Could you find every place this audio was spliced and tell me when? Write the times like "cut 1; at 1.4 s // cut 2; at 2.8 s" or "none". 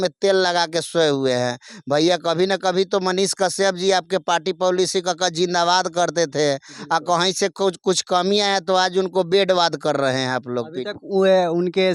none